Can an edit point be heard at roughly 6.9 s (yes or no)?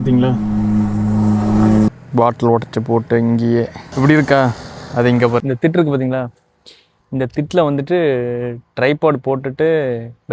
no